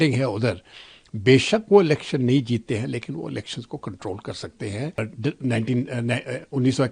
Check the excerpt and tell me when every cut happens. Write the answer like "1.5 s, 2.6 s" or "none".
5.0 s